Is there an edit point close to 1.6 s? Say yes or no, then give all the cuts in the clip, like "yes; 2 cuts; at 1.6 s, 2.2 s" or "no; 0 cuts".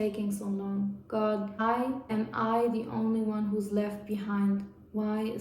yes; 1 cut; at 1.6 s